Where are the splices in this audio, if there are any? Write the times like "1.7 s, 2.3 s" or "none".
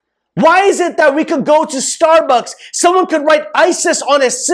none